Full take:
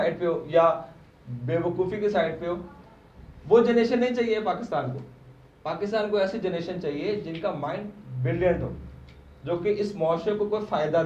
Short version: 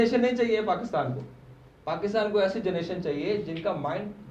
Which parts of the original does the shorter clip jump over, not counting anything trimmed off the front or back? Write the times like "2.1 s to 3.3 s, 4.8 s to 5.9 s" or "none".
none